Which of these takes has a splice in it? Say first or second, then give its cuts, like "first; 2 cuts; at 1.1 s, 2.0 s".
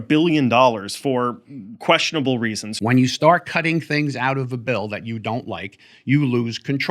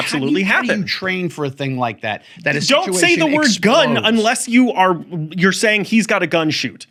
first; 1 cut; at 2.7 s